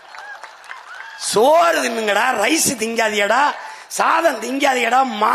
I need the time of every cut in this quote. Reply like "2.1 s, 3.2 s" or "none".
none